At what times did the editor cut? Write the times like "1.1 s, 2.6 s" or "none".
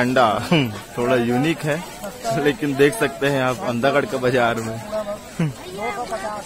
none